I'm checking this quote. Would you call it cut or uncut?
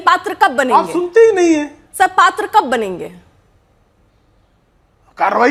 uncut